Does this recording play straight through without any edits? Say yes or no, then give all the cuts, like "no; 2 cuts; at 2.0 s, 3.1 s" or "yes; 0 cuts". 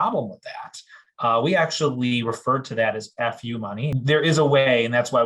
no; 1 cut; at 3.9 s